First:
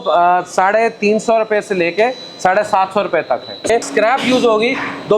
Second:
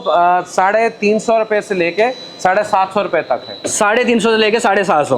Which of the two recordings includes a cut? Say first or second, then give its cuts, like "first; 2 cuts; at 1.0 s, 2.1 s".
first; 1 cut; at 3.7 s